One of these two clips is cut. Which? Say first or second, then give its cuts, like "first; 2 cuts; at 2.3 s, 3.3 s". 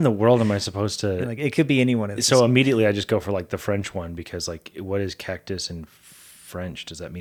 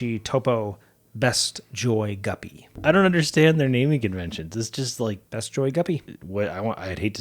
second; 2 cuts; at 5.2 s, 6.2 s